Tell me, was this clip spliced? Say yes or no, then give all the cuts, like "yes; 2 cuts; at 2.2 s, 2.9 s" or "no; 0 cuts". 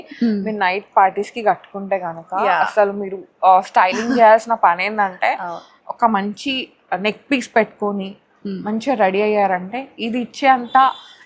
no; 0 cuts